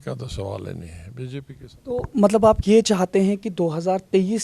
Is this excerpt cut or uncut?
cut